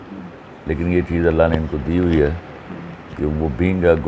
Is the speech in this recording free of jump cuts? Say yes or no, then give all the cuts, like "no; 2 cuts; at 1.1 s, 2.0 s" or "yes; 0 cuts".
yes; 0 cuts